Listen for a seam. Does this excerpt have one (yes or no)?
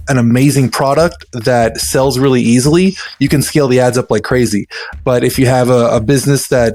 no